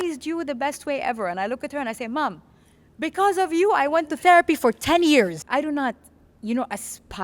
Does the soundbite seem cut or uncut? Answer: cut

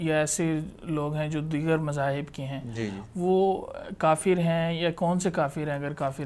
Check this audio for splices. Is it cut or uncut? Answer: uncut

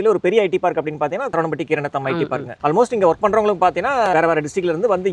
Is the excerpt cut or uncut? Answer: cut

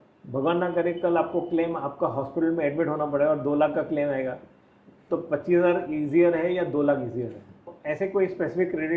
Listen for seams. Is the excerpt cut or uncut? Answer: cut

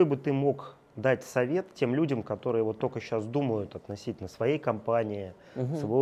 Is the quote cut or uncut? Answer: uncut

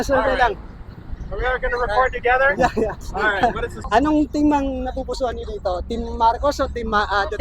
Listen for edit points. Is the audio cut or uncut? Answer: cut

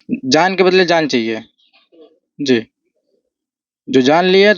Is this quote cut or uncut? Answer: uncut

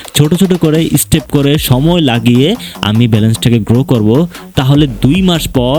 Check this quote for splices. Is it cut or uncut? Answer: uncut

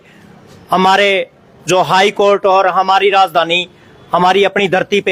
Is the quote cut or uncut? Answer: uncut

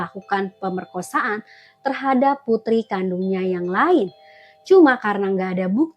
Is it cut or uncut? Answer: uncut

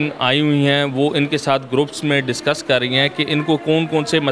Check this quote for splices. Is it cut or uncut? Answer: uncut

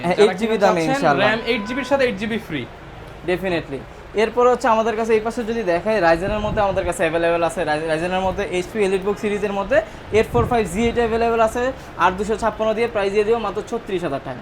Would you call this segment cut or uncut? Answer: uncut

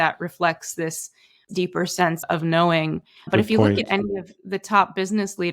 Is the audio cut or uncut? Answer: cut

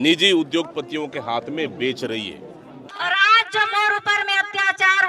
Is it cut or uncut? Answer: cut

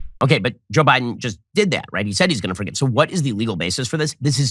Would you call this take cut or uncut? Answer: uncut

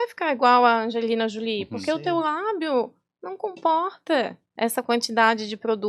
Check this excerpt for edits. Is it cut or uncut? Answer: cut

